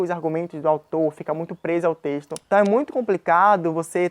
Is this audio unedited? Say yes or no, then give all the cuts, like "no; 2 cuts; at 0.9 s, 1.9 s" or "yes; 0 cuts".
no; 1 cut; at 2.4 s